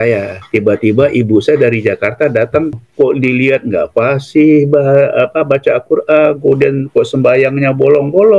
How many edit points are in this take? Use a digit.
1